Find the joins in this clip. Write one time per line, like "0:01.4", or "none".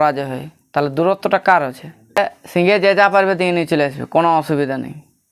0:02.2